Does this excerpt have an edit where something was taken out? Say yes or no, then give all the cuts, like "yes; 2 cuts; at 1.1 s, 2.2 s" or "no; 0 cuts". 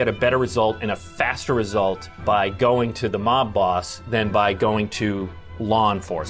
yes; 1 cut; at 2.1 s